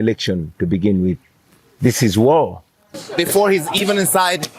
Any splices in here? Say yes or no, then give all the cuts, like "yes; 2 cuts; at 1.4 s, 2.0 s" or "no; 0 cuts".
yes; 1 cut; at 3.0 s